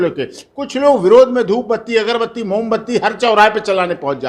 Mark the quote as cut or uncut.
uncut